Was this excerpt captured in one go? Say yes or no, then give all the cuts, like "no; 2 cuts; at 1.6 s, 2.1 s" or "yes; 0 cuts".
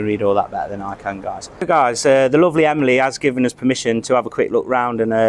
no; 1 cut; at 1.6 s